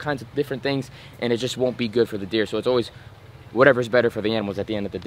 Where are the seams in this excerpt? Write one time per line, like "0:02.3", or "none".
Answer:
none